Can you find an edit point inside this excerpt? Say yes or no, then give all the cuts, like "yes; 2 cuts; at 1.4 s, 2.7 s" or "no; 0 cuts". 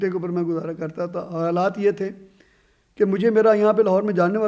no; 0 cuts